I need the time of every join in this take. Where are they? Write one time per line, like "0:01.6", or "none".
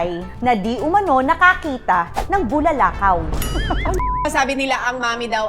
0:04.2